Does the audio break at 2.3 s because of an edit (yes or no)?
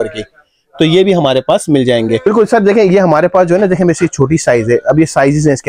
yes